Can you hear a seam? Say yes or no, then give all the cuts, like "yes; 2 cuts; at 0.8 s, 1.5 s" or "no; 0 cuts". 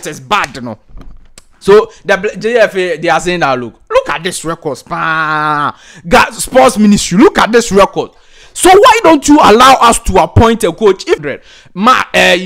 yes; 1 cut; at 11.2 s